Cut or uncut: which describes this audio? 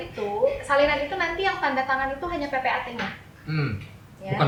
uncut